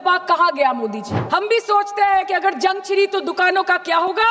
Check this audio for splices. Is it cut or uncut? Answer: cut